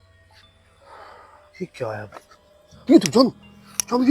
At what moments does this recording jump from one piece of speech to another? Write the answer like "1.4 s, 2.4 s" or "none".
0.9 s